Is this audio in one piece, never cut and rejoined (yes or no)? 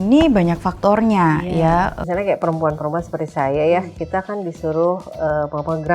no